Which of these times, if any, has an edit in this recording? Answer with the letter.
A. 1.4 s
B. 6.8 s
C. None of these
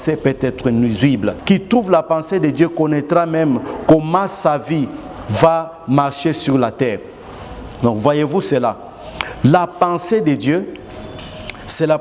A